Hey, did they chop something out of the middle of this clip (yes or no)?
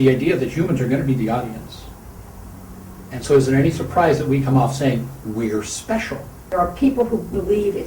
yes